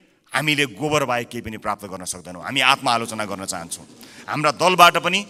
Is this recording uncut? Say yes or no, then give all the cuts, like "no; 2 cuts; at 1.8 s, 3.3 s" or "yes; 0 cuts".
yes; 0 cuts